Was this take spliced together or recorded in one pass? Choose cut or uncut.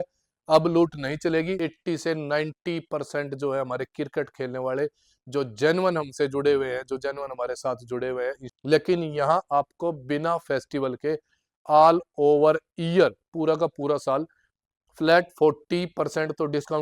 cut